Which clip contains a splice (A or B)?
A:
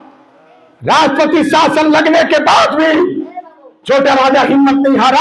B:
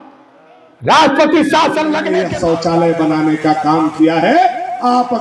B